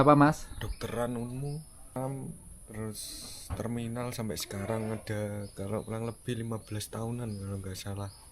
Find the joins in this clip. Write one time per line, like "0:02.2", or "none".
0:02.0